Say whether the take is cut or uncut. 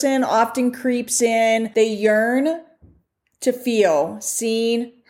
cut